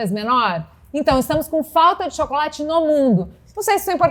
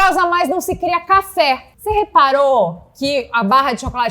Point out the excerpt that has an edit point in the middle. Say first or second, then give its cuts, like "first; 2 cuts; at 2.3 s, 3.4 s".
second; 1 cut; at 1.7 s